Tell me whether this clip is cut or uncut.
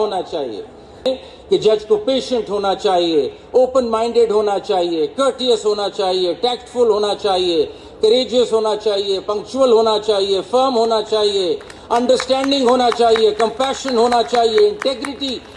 cut